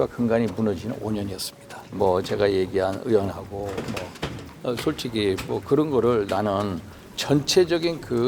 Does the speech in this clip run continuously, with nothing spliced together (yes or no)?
no